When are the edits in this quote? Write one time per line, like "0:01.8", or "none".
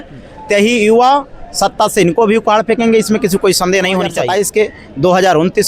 0:04.2